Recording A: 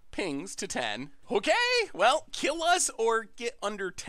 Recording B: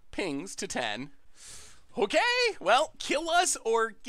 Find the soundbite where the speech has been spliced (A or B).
A